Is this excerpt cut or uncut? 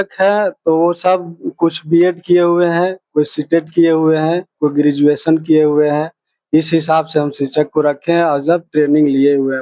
uncut